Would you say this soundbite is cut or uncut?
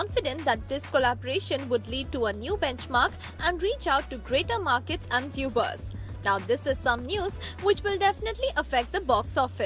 uncut